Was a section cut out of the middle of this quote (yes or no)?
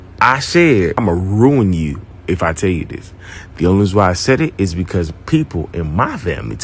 yes